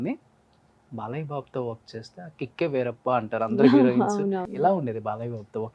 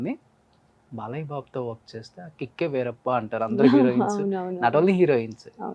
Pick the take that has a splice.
first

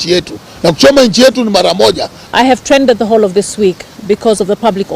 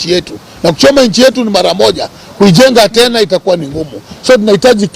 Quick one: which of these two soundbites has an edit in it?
first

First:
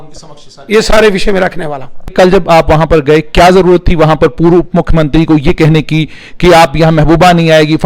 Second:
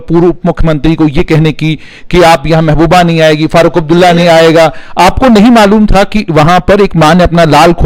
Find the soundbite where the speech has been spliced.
first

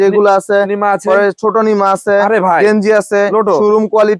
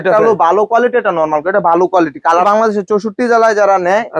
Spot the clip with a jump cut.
second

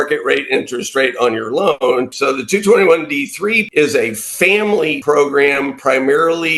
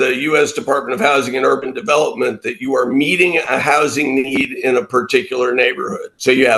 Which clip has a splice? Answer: first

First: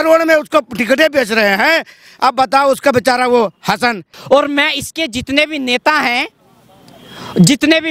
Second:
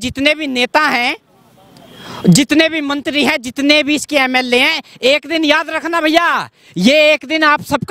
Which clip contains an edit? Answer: first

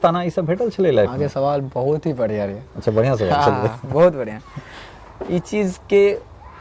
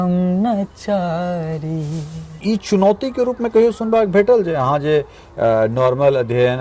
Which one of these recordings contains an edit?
second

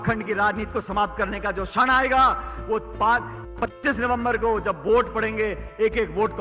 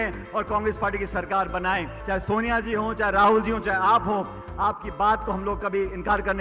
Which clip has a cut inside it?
second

